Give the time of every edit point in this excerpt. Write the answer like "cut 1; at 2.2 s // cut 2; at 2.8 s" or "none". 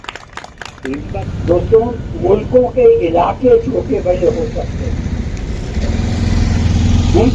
cut 1; at 1.1 s